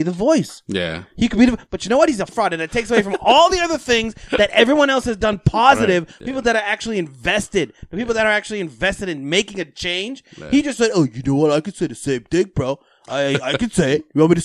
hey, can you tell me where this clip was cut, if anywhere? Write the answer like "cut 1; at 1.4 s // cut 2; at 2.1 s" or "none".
cut 1; at 2.3 s // cut 2; at 6.1 s